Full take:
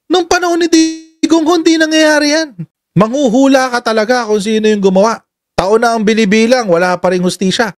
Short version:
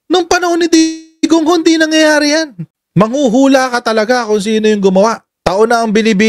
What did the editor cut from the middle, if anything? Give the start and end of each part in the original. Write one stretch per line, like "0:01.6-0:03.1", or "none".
0:05.3-0:05.4